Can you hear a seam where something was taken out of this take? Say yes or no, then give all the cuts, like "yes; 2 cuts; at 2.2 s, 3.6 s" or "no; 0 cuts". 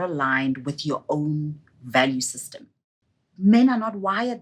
yes; 1 cut; at 2.9 s